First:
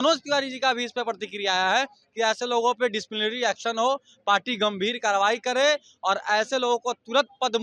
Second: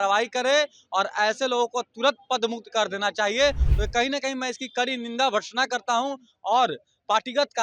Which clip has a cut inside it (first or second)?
second